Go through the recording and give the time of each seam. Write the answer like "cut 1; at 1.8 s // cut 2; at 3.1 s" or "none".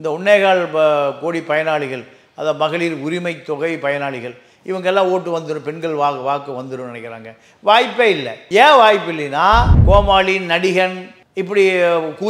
cut 1; at 8.3 s // cut 2; at 9.7 s